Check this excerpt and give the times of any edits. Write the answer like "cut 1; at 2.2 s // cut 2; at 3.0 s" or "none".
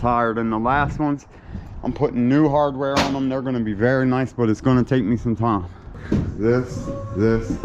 cut 1; at 5.9 s